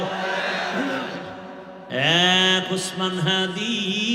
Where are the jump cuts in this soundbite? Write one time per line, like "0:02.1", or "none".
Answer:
0:01.7